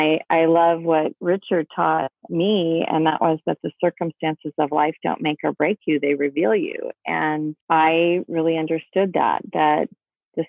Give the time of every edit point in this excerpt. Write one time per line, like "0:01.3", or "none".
0:07.6